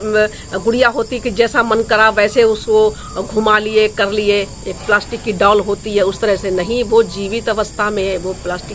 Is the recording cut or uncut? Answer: uncut